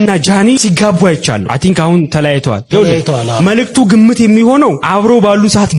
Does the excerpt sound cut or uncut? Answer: uncut